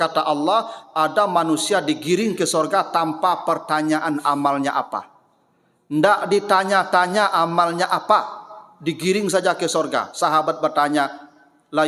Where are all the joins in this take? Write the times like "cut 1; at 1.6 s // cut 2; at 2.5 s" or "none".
none